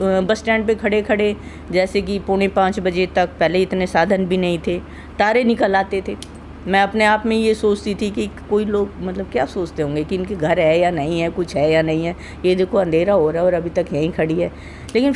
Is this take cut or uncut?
uncut